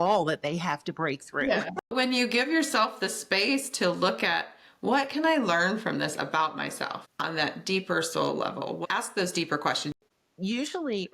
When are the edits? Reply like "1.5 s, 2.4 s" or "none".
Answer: 1.9 s, 10.0 s

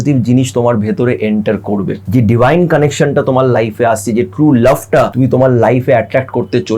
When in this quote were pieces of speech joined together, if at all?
2.0 s, 5.1 s

